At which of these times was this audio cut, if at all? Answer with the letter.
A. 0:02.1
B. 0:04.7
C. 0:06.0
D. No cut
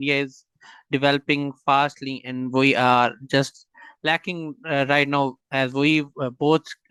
D